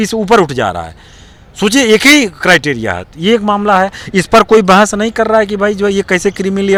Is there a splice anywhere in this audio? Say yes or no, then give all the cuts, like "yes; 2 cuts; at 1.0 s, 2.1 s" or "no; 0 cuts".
no; 0 cuts